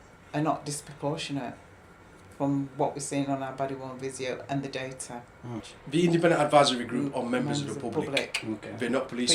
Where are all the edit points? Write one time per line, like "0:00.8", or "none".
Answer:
0:05.6